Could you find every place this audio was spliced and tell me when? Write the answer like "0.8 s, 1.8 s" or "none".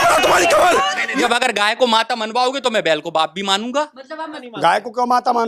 1.2 s, 4.3 s